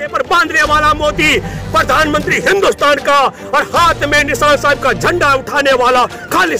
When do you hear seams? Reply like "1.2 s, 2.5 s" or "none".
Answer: none